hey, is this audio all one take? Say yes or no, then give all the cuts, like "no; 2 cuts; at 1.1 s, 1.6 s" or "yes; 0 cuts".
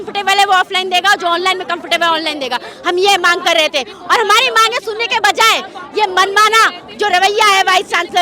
yes; 0 cuts